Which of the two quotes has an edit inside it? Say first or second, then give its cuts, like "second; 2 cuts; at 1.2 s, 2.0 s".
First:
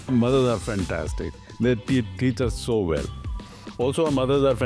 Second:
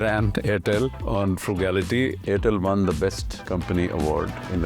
second; 2 cuts; at 1.0 s, 2.2 s